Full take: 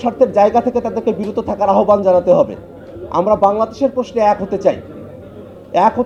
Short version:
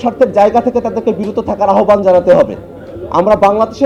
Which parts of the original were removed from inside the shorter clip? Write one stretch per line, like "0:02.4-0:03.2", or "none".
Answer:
none